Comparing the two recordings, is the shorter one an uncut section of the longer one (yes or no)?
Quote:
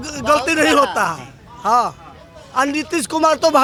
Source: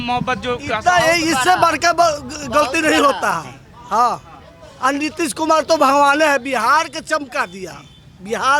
yes